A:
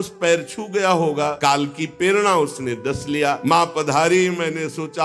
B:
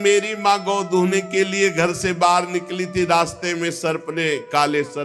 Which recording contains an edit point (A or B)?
A